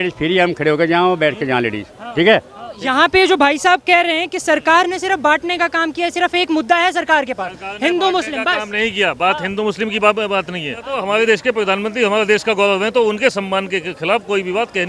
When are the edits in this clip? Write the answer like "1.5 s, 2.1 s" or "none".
2.6 s, 10.9 s